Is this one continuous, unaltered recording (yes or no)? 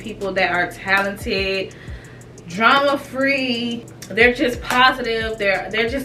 yes